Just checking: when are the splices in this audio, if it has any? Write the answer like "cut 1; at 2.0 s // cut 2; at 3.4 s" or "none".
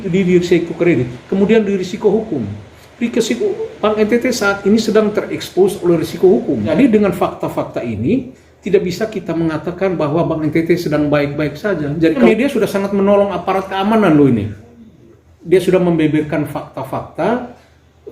cut 1; at 6.7 s // cut 2; at 12.2 s